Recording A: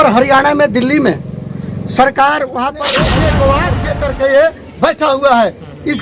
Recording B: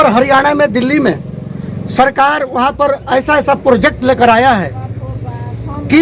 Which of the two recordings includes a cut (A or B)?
A